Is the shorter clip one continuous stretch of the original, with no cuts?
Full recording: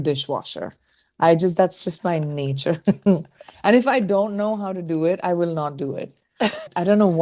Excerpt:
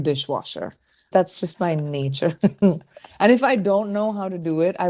no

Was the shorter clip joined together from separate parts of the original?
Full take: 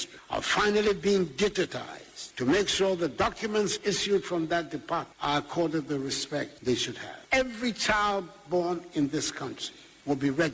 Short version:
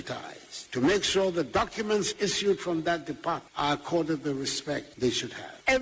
no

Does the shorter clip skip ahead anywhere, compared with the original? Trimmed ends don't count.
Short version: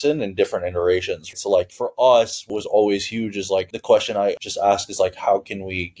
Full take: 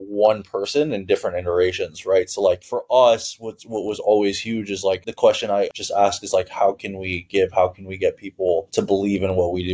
yes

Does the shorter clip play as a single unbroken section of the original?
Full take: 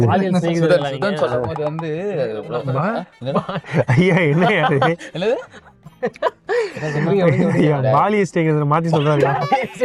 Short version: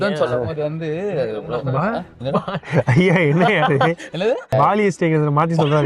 no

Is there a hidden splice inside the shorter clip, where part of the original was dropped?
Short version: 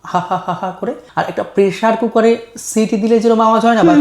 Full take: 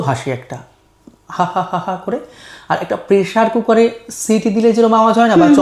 yes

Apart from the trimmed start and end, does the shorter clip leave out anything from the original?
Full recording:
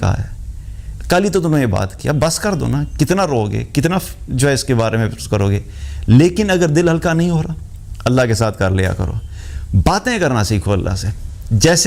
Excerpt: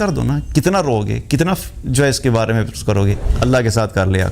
yes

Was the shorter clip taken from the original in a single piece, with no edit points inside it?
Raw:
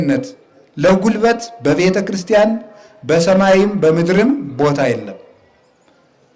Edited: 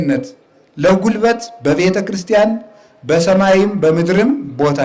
yes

